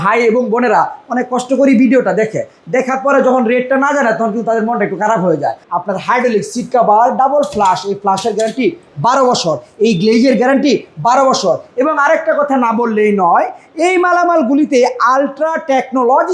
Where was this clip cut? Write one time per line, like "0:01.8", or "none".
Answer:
0:05.6